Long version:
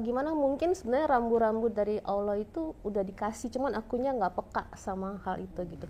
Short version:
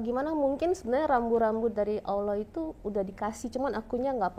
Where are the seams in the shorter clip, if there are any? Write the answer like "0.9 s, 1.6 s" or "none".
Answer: none